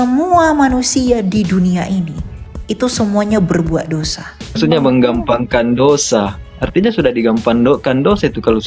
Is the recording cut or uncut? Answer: cut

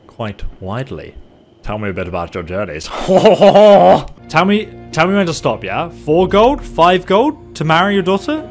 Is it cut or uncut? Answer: cut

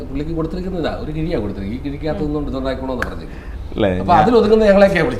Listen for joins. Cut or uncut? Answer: uncut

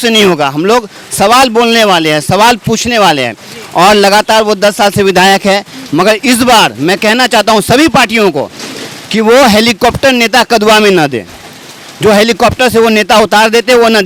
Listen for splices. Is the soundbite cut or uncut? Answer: uncut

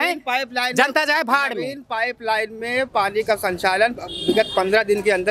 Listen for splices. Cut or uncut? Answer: uncut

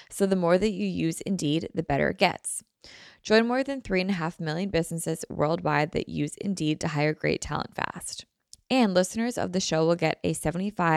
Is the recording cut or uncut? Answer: uncut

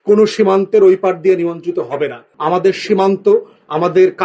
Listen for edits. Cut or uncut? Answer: cut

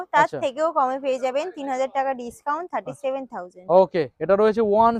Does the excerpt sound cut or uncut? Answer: uncut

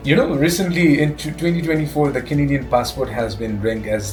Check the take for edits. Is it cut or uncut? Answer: uncut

